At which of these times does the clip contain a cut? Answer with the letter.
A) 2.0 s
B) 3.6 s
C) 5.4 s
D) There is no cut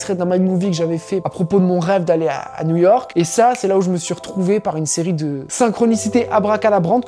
C